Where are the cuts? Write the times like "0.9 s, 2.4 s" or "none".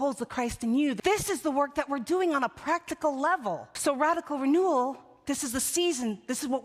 1.0 s, 3.7 s